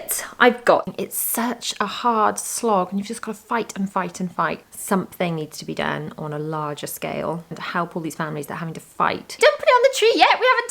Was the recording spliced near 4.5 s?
no; 3 cuts; at 0.9 s, 7.6 s, 9.3 s

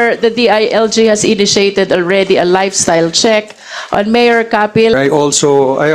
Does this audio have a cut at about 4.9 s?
yes; 1 cut; at 4.9 s

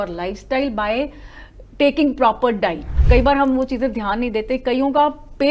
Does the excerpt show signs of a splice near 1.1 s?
no; 1 cut; at 2.9 s

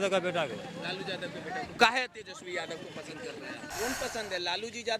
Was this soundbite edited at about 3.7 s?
yes; 1 cut; at 3.7 s

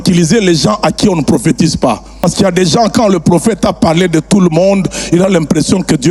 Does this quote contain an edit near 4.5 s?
no; 1 cut; at 2.1 s

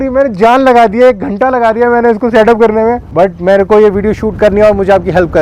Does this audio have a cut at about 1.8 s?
no; 1 cut; at 3.0 s

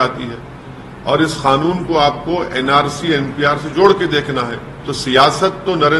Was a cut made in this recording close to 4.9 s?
no; 0 cuts

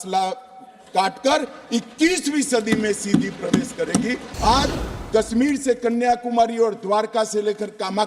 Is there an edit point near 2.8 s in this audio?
no; 1 cut; at 4.2 s

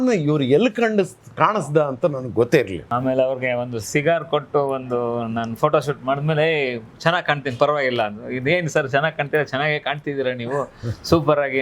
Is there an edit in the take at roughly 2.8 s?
yes; 1 cut; at 2.8 s

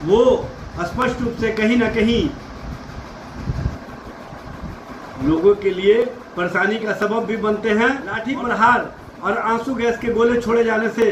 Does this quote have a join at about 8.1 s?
yes; 1 cut; at 8.1 s

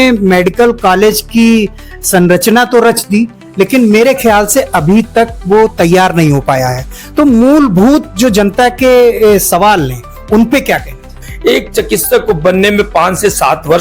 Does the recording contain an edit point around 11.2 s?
yes; 1 cut; at 11.2 s

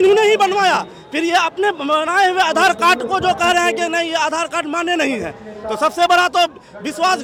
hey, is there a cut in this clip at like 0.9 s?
no; 0 cuts

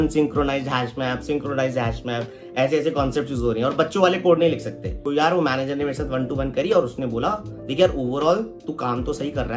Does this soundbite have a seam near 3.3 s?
no; 1 cut; at 5.1 s

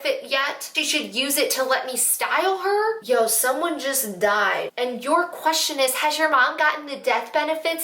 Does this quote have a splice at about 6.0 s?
no; 0 cuts

